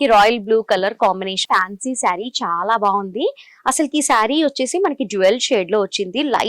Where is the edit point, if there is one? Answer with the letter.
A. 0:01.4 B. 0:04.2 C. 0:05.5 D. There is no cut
A